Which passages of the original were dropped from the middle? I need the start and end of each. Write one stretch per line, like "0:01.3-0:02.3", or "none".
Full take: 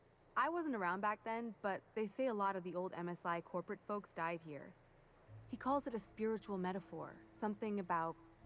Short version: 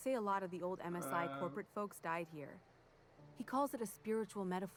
none